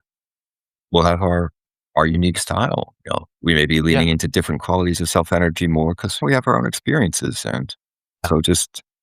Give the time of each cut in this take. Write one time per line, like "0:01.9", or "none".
0:03.3
0:06.2
0:08.3